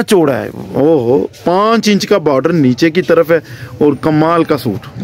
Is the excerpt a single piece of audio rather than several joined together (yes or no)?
yes